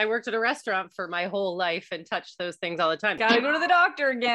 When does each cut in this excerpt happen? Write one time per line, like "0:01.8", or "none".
0:03.2